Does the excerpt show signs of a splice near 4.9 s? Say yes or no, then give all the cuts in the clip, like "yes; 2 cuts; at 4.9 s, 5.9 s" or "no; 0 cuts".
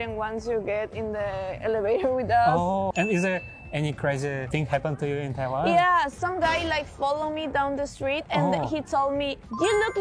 no; 1 cut; at 2.9 s